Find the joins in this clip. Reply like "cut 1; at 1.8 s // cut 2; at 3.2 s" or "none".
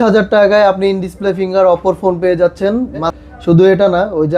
cut 1; at 3.1 s